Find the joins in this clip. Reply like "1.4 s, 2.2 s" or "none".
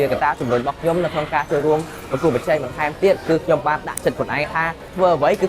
none